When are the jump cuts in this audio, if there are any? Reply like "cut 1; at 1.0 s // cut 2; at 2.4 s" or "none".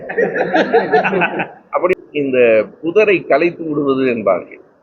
cut 1; at 1.9 s